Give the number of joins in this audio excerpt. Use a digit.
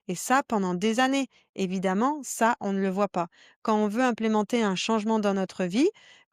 0